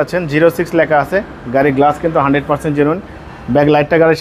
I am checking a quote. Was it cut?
no; 0 cuts

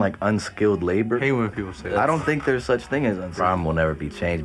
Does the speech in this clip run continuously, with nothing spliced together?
no; 2 cuts; at 1.2 s, 3.3 s

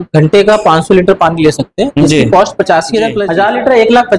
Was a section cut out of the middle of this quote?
yes; 1 cut; at 3.2 s

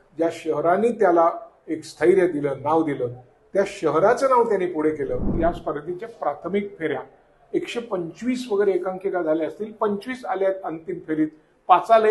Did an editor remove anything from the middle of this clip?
yes; 1 cut; at 5.3 s

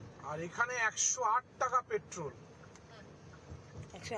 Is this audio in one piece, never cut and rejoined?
yes; 0 cuts

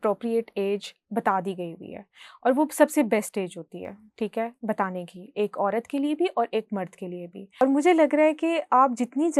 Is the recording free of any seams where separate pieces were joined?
no; 1 cut; at 7.6 s

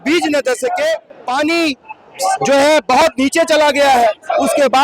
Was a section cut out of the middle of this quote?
yes; 1 cut; at 1.1 s

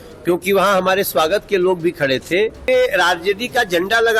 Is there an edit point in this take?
yes; 1 cut; at 2.6 s

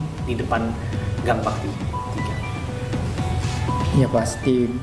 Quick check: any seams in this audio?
no; 0 cuts

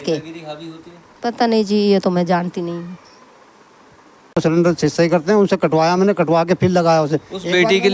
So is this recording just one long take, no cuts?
no; 1 cut; at 4.4 s

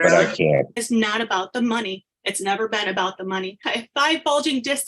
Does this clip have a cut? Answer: yes; 2 cuts; at 0.8 s, 3.6 s

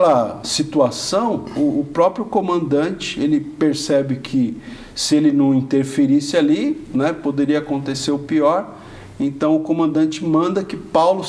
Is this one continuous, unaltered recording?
yes; 0 cuts

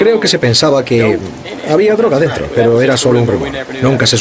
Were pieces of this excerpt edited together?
no; 0 cuts

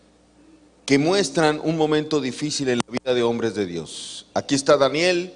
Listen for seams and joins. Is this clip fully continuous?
yes; 0 cuts

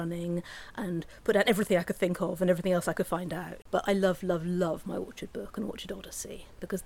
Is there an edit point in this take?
yes; 1 cut; at 3.5 s

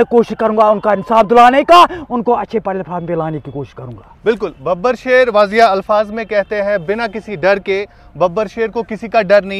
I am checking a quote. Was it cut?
no; 0 cuts

